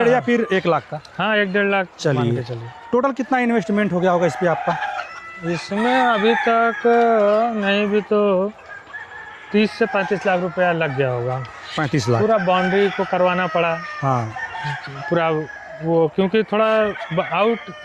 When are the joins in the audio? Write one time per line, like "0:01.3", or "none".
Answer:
none